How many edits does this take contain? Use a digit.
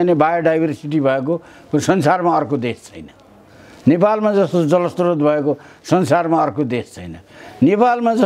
0